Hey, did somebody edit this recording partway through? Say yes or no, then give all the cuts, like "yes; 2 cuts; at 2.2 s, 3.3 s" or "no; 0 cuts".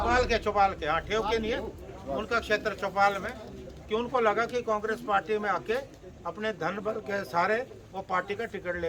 no; 0 cuts